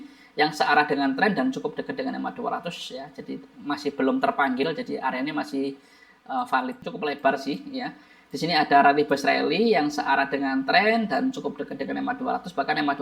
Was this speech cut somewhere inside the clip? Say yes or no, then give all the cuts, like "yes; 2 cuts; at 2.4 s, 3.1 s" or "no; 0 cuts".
yes; 1 cut; at 6.8 s